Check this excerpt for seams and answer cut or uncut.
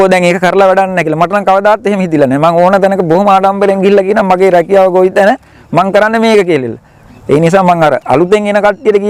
uncut